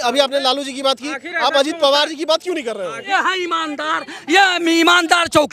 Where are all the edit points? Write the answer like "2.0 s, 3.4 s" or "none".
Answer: 3.0 s